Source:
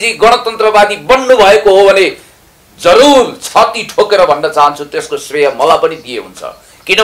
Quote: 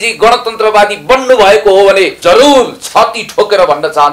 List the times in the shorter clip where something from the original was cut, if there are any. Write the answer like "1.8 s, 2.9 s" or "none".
2.1 s